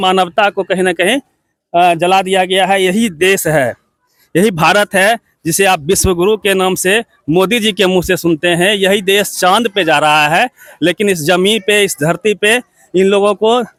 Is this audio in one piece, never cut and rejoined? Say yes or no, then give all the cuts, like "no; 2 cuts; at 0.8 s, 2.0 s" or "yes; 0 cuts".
yes; 0 cuts